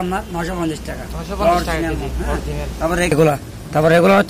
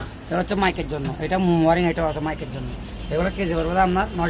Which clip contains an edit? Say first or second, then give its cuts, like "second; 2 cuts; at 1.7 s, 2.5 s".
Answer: first; 1 cut; at 3.1 s